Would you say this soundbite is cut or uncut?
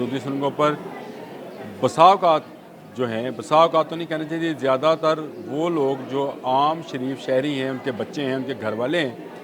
uncut